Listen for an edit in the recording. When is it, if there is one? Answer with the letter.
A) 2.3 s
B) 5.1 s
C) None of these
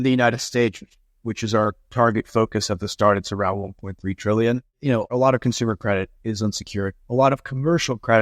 B